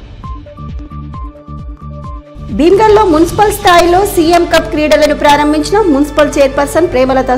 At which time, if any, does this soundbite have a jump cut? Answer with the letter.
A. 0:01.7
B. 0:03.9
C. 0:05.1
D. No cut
D